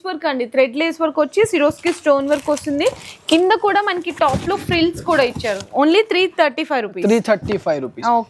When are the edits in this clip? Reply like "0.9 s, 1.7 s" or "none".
none